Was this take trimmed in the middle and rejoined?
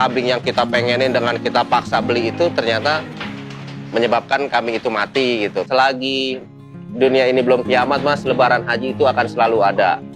yes; 1 cut; at 5.6 s

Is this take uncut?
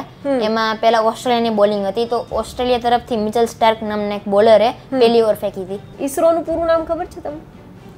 no; 1 cut; at 5.9 s

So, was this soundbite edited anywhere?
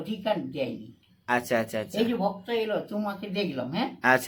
no; 0 cuts

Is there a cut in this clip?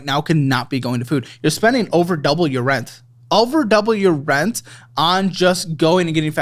no; 0 cuts

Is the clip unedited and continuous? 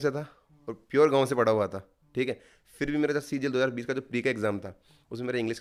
yes; 0 cuts

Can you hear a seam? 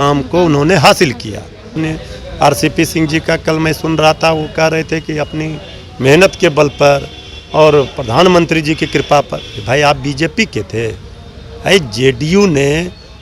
yes; 1 cut; at 1.7 s

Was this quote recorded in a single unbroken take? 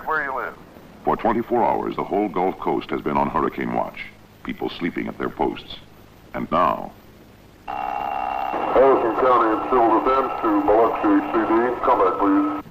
no; 1 cut; at 5.1 s

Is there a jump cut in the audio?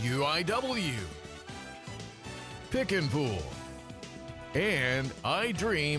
yes; 1 cut; at 1.0 s

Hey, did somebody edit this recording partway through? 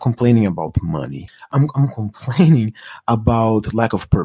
yes; 1 cut; at 1.5 s

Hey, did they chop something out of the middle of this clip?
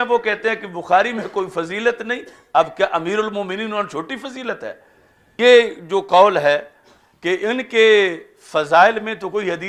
yes; 1 cut; at 5.3 s

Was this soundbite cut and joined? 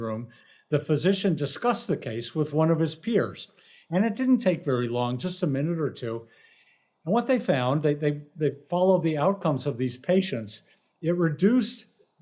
no; 0 cuts

